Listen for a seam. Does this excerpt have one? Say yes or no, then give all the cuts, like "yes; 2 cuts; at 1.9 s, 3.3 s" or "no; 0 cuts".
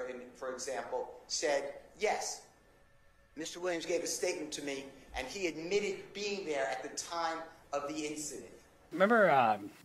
yes; 1 cut; at 8.9 s